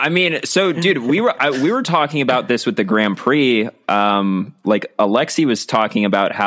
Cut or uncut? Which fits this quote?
uncut